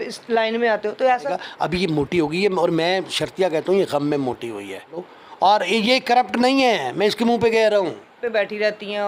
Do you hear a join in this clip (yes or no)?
yes